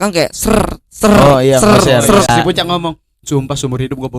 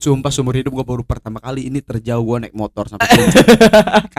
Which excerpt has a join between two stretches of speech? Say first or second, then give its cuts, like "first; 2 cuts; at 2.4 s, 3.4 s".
first; 1 cut; at 2.3 s